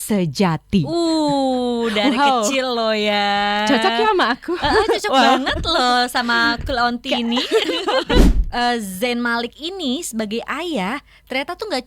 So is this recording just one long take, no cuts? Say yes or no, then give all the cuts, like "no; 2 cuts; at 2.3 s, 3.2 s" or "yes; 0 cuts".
no; 1 cut; at 8.2 s